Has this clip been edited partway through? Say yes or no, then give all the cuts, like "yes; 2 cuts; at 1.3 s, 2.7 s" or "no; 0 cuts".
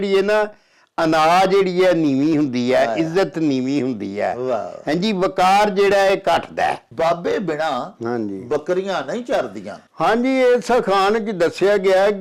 yes; 1 cut; at 6.9 s